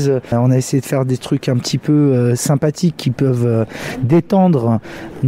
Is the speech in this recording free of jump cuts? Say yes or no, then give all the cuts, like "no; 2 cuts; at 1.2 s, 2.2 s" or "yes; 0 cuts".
yes; 0 cuts